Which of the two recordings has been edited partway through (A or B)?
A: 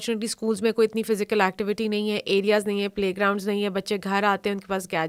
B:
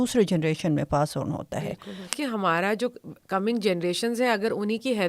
B